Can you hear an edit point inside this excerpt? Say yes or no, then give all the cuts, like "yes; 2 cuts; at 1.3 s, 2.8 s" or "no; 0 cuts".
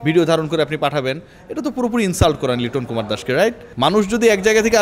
yes; 1 cut; at 3.7 s